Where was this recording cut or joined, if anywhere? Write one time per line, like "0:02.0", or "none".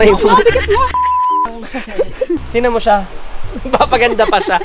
0:02.4